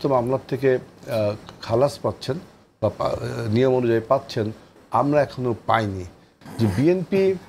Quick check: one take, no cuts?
no; 1 cut; at 6.3 s

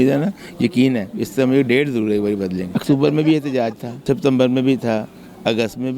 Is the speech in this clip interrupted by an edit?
yes; 2 cuts; at 2.7 s, 3.9 s

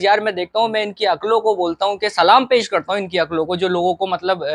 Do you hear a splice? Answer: no; 0 cuts

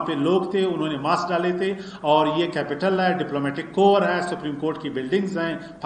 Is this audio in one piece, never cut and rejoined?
yes; 0 cuts

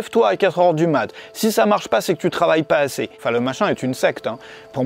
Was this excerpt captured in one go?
no; 1 cut; at 3.2 s

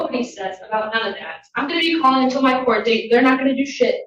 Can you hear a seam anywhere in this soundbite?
no; 0 cuts

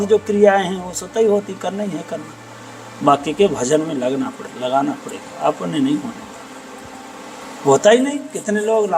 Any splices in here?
no; 0 cuts

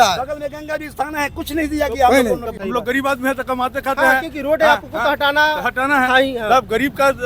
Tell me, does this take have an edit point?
yes; 1 cut; at 2.5 s

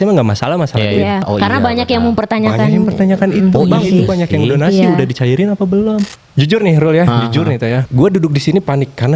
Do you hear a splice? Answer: yes; 3 cuts; at 1.3 s, 6.1 s, 7.9 s

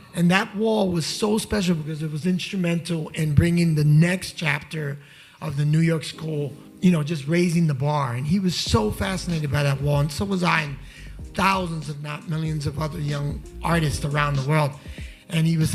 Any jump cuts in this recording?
no; 0 cuts

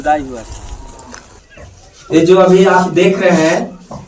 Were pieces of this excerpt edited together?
yes; 1 cut; at 1.5 s

